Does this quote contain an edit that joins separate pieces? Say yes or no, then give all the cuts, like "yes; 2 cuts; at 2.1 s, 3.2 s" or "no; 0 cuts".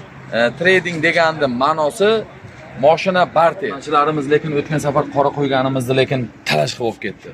yes; 1 cut; at 3.8 s